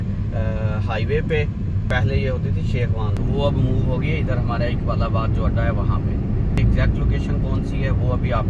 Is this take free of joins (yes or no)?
no